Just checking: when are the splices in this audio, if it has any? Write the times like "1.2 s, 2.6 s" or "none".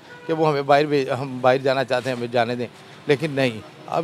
none